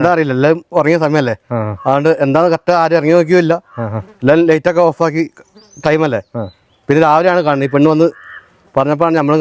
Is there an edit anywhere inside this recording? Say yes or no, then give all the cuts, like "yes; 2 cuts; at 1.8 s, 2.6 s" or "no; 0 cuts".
no; 0 cuts